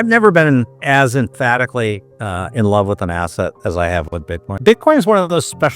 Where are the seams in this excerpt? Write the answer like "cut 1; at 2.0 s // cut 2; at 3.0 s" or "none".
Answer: cut 1; at 2.1 s // cut 2; at 4.6 s

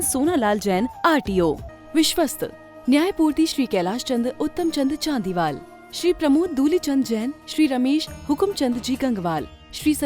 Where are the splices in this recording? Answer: cut 1; at 1.7 s

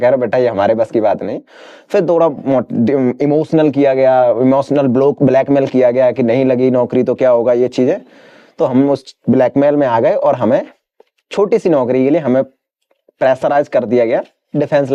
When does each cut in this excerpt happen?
none

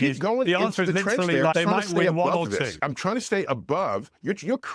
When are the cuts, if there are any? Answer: cut 1; at 1.5 s // cut 2; at 2.8 s

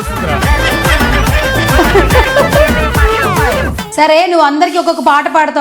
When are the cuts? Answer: cut 1; at 3.6 s

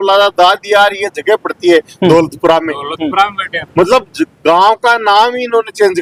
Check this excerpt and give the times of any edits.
none

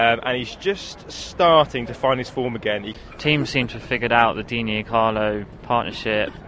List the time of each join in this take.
cut 1; at 2.9 s

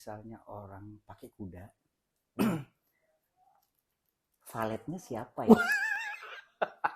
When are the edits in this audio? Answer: none

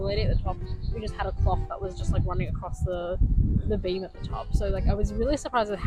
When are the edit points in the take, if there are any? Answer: none

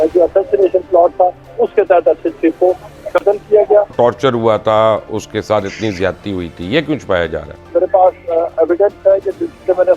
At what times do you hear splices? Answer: cut 1; at 3.9 s // cut 2; at 7.7 s

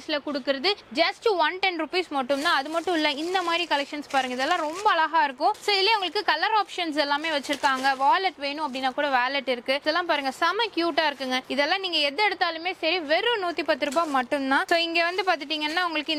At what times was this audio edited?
none

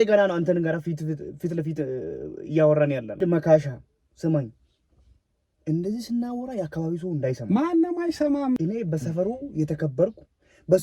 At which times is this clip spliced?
cut 1; at 3.1 s // cut 2; at 8.6 s

